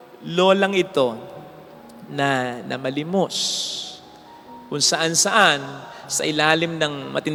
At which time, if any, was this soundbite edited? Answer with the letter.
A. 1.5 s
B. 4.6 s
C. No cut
C